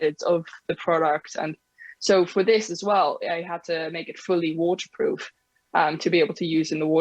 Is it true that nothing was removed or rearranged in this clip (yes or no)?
yes